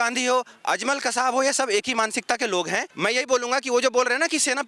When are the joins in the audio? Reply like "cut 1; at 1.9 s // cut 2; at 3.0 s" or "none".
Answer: cut 1; at 2.9 s